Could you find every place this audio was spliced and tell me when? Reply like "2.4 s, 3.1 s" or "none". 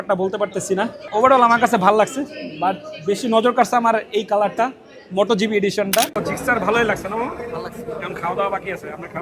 1.0 s, 6.2 s